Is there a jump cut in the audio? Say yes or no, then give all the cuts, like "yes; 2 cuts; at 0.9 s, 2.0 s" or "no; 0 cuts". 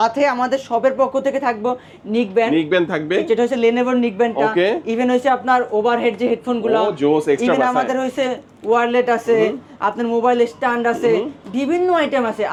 no; 0 cuts